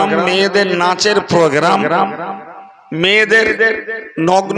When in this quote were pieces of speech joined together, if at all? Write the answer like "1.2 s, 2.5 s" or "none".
none